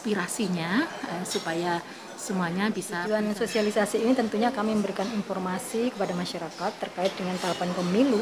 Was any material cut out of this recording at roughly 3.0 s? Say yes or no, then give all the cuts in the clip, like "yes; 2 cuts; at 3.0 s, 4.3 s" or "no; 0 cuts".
yes; 1 cut; at 3.0 s